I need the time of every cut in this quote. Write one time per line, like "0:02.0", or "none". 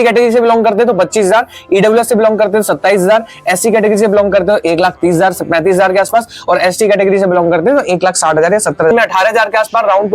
0:08.9